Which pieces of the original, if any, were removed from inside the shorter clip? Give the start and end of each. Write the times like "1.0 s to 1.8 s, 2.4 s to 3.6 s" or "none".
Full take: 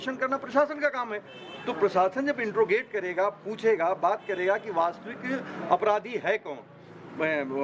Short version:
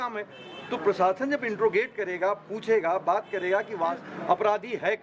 5.0 s to 5.5 s